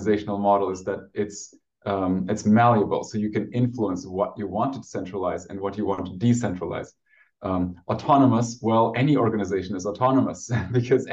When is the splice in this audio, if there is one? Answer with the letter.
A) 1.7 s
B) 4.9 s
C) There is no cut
C